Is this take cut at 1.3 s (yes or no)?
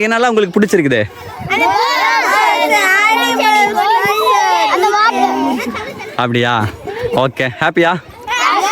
no